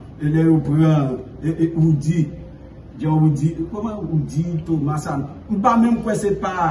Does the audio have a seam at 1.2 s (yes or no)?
yes